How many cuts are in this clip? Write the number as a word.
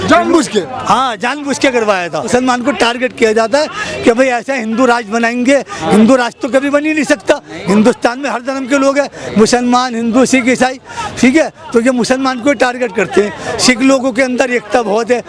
one